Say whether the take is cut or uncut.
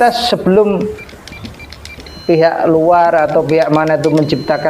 uncut